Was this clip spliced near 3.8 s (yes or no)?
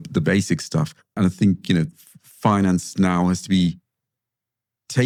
no